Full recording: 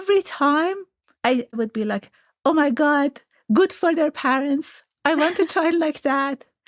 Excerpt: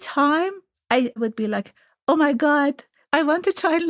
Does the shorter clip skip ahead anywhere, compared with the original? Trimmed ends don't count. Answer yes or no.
yes